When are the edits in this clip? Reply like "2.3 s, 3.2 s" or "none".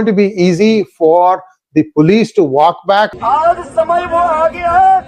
3.1 s